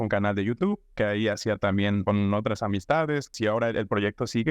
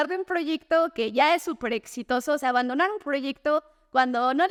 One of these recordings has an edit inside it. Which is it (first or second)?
first